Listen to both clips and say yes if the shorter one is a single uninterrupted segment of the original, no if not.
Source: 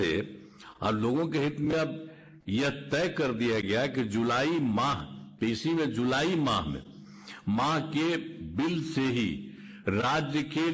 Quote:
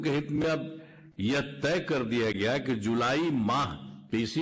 yes